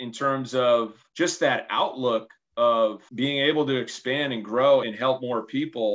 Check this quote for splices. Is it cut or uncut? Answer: uncut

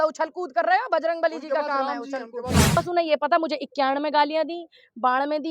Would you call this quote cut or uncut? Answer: cut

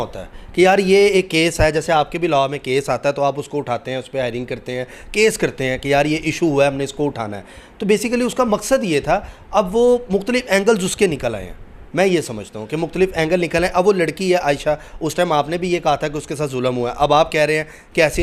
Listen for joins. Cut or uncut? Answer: uncut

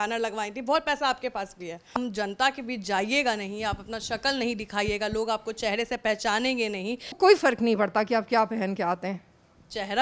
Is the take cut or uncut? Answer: cut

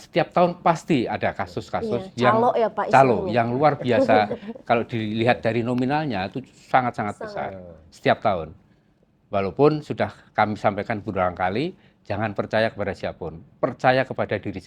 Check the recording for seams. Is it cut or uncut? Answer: uncut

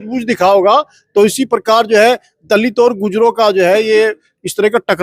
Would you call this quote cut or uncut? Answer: uncut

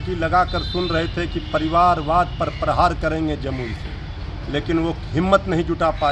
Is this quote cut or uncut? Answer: uncut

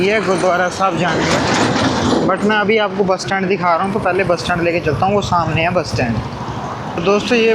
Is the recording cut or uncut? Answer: uncut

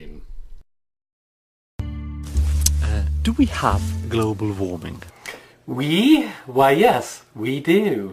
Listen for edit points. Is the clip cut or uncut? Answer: cut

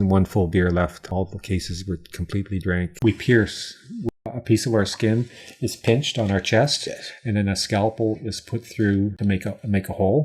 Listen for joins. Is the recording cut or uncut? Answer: cut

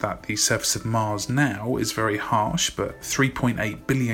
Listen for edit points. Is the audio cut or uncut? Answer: uncut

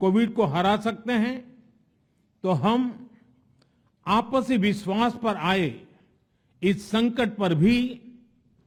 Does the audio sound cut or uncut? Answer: uncut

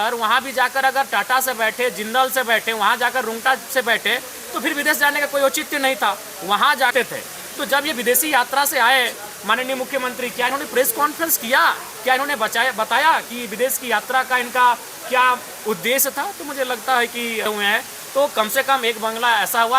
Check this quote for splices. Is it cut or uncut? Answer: cut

